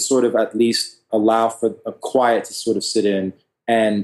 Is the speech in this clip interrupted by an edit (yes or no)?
yes